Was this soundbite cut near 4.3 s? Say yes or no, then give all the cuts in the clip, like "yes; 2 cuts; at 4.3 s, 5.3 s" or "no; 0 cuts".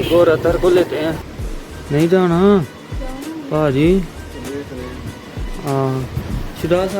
no; 1 cut; at 1.3 s